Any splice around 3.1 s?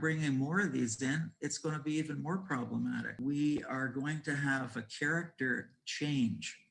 yes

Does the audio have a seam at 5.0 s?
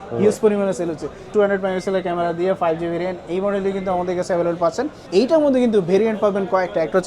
yes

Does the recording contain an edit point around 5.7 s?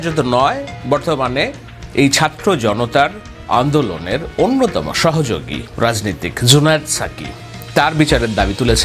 no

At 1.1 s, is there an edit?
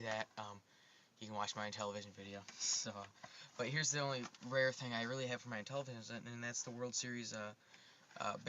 yes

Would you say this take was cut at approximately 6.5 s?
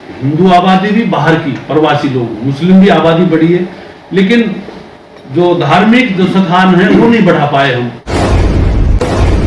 no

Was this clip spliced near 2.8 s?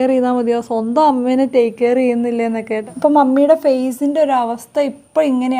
yes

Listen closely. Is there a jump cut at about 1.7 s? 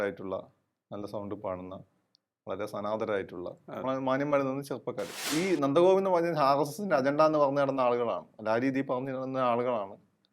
no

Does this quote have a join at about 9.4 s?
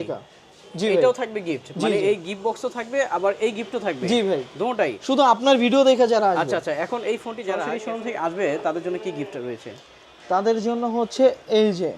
no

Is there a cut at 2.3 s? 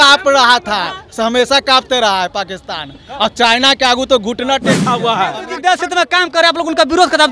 no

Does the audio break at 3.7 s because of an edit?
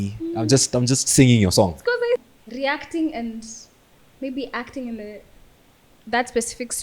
no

